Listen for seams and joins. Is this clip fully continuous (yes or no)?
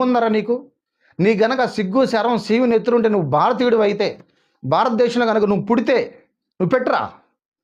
yes